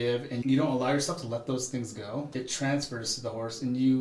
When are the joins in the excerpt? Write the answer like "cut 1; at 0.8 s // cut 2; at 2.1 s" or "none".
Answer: cut 1; at 2.3 s